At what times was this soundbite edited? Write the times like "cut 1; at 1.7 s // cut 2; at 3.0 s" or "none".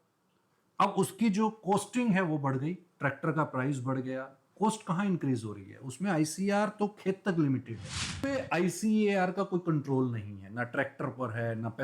cut 1; at 8.1 s